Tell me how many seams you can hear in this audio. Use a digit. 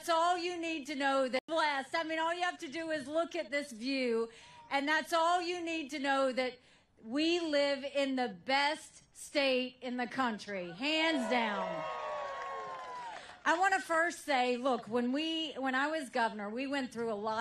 4